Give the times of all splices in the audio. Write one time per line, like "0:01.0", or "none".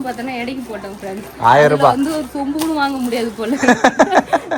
none